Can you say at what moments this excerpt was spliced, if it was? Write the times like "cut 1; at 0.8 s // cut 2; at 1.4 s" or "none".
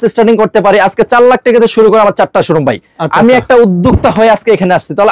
none

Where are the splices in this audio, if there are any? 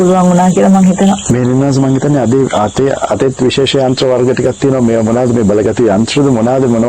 none

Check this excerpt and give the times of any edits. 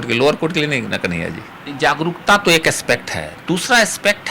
cut 1; at 1.6 s

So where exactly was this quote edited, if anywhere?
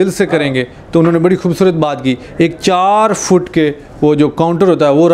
none

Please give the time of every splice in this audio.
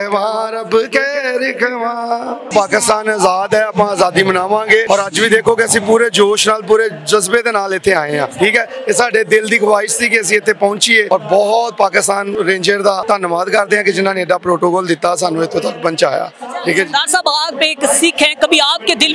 cut 1; at 2.5 s // cut 2; at 4.8 s // cut 3; at 8.3 s // cut 4; at 11.1 s // cut 5; at 12.3 s // cut 6; at 13.0 s

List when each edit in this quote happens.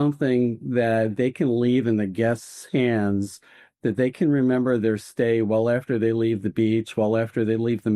none

